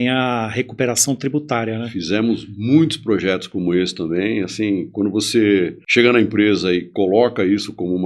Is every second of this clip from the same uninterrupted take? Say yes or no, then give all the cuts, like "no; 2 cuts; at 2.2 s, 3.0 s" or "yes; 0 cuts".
no; 1 cut; at 5.8 s